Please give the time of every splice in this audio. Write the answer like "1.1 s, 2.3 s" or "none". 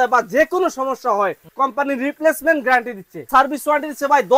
1.4 s, 3.3 s